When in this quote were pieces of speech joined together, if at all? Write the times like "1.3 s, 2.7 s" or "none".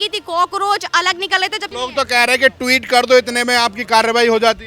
1.6 s